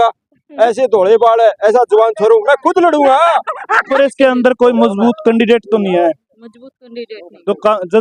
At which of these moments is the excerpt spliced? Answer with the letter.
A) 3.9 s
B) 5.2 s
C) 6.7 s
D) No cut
A